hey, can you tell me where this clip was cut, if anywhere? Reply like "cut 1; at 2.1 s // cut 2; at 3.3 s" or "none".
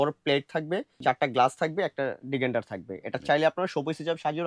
cut 1; at 0.9 s